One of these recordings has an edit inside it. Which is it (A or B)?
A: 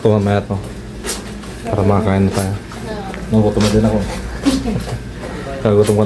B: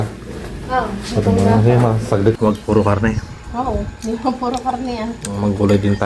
B